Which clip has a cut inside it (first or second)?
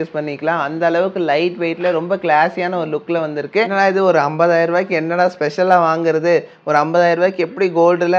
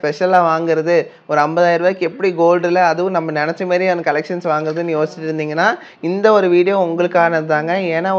first